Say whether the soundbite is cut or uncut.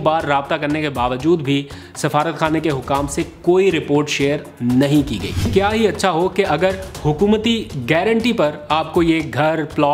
cut